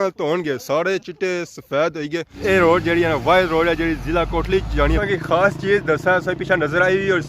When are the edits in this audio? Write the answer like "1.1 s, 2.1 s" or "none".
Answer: 2.3 s, 5.0 s